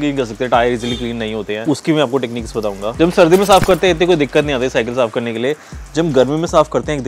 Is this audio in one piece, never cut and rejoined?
yes; 0 cuts

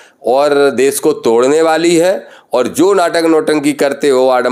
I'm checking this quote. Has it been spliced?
no; 0 cuts

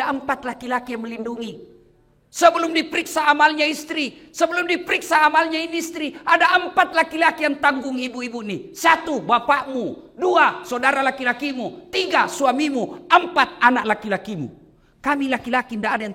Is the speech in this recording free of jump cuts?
yes; 0 cuts

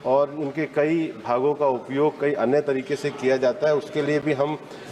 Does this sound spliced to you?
no; 0 cuts

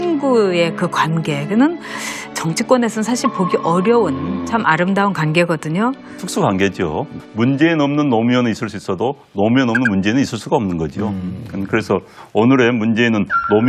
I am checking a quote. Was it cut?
no; 0 cuts

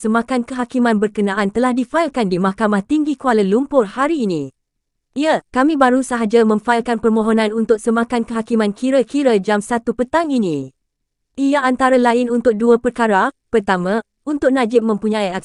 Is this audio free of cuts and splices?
yes; 0 cuts

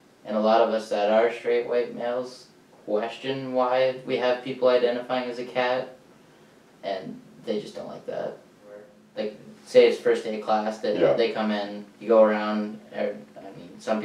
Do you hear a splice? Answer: yes; 1 cut; at 9.0 s

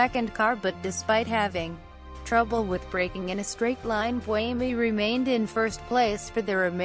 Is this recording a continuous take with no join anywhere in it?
no; 1 cut; at 2.4 s

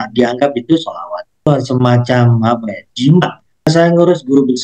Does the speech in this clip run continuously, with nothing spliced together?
no; 2 cuts; at 1.5 s, 3.7 s

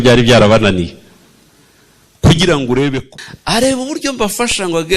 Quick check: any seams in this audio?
yes; 1 cut; at 3.0 s

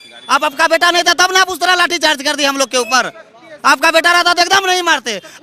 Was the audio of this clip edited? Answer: no; 0 cuts

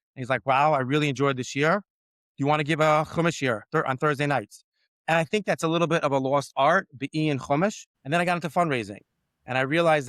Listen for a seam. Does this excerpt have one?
yes; 1 cut; at 7.9 s

